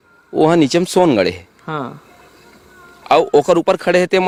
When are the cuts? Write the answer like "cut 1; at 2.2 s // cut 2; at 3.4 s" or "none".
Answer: none